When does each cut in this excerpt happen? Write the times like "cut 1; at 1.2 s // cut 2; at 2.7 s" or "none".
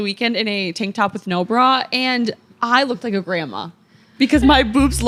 none

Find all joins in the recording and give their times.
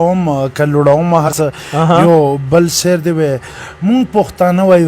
cut 1; at 1.3 s

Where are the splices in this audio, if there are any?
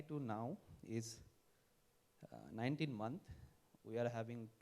none

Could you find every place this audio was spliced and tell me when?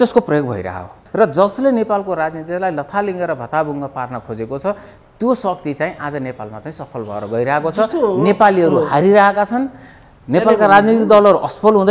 cut 1; at 1.0 s

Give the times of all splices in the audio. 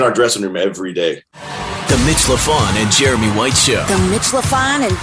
cut 1; at 1.3 s

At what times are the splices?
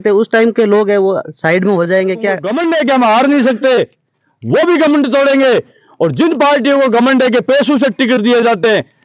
cut 1; at 2.5 s

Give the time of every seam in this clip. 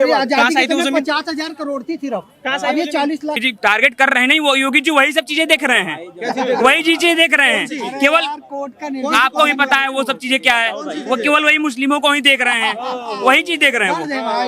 cut 1; at 3.4 s

